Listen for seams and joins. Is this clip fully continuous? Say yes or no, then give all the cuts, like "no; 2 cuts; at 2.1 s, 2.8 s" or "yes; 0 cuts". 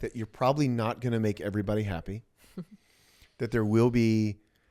yes; 0 cuts